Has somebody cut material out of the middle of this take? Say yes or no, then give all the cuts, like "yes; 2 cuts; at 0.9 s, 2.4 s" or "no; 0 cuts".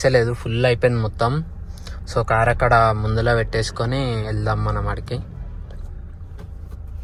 no; 0 cuts